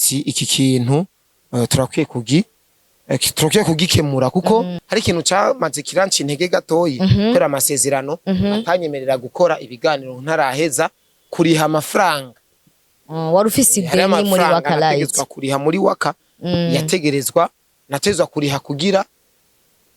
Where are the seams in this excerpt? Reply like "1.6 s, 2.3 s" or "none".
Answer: 4.8 s